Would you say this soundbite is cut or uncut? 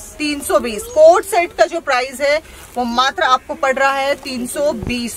uncut